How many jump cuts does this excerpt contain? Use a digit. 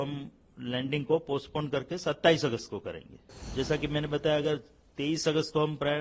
1